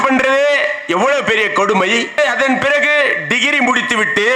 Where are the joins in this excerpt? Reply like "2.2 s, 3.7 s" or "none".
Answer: 2.2 s